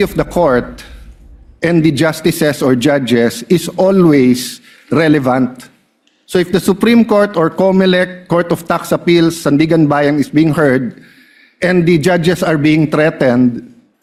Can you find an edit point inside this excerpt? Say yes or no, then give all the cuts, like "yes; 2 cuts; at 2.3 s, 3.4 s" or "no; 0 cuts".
no; 0 cuts